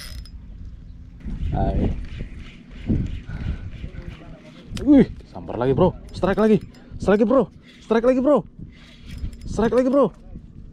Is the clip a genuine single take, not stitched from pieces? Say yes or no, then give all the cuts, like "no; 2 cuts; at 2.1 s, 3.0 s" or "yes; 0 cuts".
no; 1 cut; at 1.2 s